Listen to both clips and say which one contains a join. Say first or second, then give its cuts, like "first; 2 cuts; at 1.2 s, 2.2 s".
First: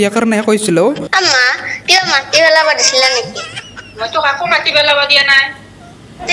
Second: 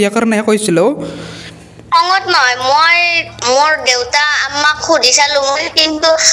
first; 1 cut; at 1.0 s